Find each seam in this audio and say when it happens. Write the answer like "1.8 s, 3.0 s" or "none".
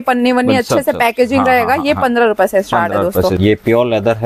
3.4 s